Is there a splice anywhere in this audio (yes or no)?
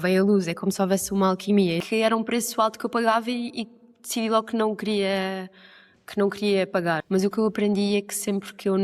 yes